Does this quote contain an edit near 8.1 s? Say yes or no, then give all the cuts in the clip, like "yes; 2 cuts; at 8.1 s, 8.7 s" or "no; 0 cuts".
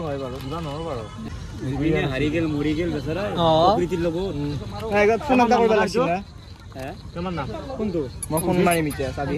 no; 1 cut; at 1.3 s